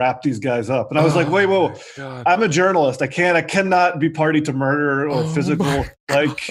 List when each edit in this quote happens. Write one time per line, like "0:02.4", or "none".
none